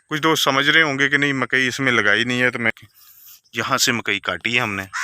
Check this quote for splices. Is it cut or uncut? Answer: cut